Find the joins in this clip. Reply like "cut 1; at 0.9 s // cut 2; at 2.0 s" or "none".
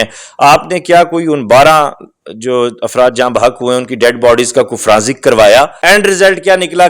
cut 1; at 5.7 s